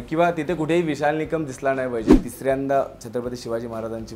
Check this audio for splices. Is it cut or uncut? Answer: cut